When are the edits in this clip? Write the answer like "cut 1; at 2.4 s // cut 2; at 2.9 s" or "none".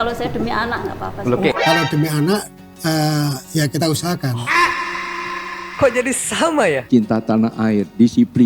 cut 1; at 6.8 s